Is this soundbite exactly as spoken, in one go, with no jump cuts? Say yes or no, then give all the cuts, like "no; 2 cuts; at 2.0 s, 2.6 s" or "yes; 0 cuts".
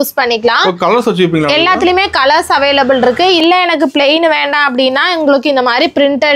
no; 1 cut; at 3.4 s